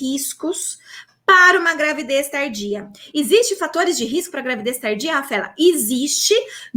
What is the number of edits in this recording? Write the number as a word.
zero